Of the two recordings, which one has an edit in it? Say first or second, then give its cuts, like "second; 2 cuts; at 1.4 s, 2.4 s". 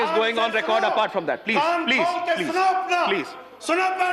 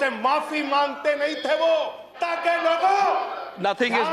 second; 1 cut; at 2.1 s